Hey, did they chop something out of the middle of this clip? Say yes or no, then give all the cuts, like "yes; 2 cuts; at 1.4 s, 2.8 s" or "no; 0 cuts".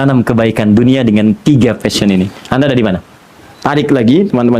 yes; 1 cut; at 3.5 s